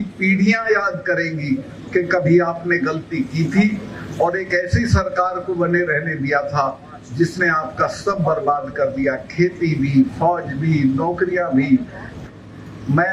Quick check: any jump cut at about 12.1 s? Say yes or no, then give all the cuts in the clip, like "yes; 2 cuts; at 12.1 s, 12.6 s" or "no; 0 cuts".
yes; 1 cut; at 12.1 s